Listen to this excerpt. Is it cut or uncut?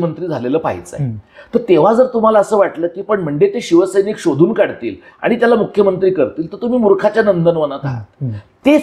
uncut